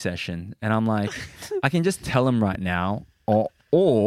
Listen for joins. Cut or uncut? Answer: uncut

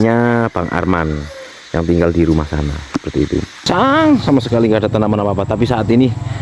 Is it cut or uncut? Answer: cut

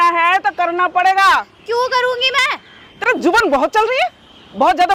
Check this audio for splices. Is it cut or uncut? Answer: uncut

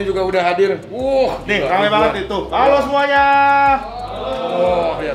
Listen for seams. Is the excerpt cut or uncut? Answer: uncut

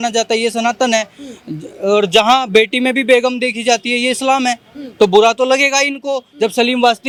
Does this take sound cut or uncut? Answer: uncut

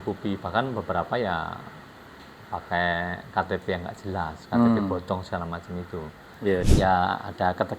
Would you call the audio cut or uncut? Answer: cut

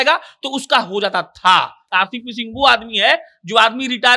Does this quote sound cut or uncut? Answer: cut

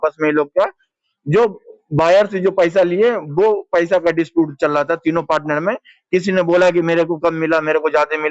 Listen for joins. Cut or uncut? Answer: uncut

